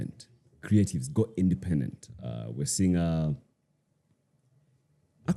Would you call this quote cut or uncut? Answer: uncut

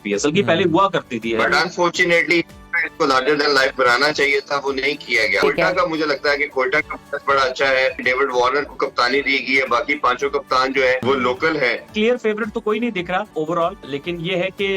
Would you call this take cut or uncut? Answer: cut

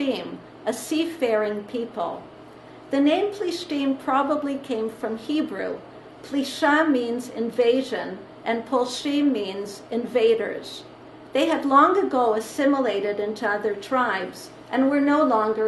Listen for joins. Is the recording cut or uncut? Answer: cut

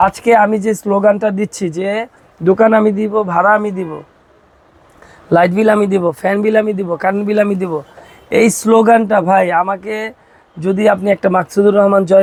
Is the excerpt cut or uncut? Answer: uncut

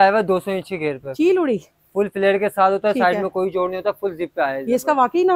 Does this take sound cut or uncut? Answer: uncut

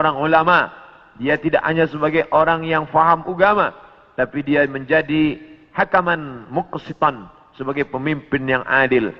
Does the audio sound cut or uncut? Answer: uncut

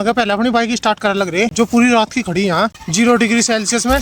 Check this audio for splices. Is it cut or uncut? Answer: cut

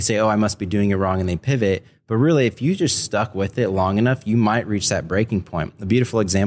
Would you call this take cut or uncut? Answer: uncut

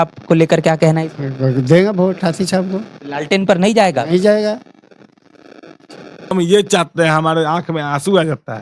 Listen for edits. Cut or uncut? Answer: cut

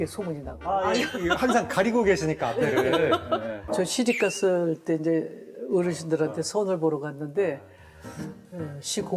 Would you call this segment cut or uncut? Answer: cut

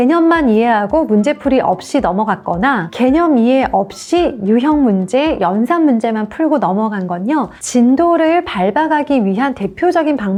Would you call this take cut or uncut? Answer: uncut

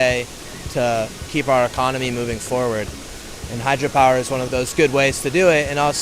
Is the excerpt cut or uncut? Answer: cut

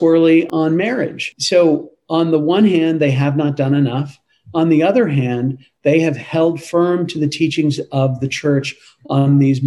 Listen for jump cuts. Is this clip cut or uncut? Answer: uncut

